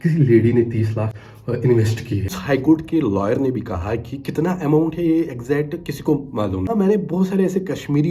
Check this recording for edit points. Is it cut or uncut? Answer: cut